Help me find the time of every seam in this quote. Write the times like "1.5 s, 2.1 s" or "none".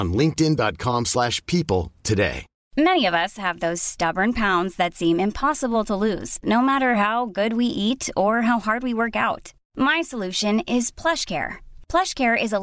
2.6 s